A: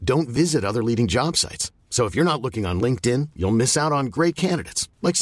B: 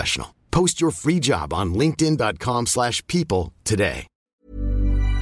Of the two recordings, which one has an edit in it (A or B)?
B